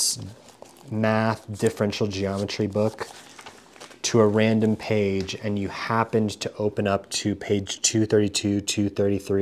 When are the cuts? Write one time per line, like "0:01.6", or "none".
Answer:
none

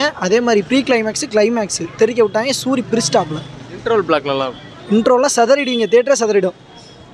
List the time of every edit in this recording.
none

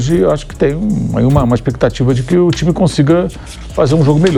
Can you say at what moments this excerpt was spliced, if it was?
none

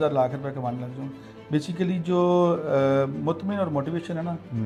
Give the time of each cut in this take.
none

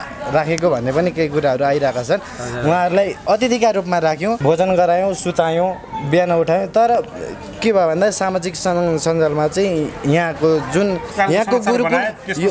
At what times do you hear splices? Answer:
0:04.4
0:11.1

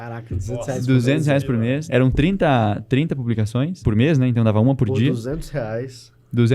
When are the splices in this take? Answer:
0:01.8
0:03.8

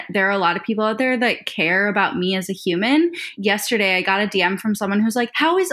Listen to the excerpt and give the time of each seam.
0:03.3

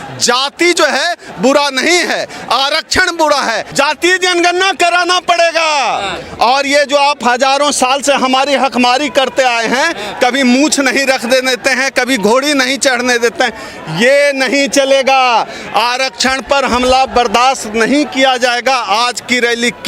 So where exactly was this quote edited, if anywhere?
0:03.6

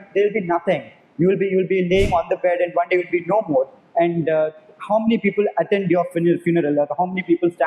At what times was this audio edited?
none

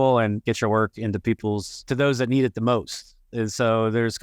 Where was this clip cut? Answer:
0:01.8

